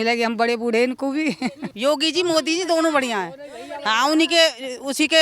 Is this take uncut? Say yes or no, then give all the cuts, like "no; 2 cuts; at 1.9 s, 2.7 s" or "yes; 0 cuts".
no; 1 cut; at 1.7 s